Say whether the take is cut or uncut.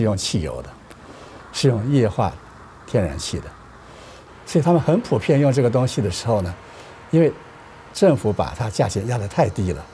uncut